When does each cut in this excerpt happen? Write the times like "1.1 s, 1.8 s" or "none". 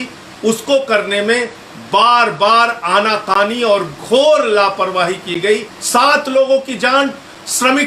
5.7 s